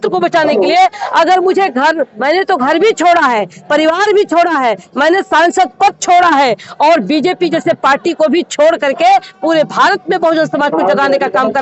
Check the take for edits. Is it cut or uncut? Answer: uncut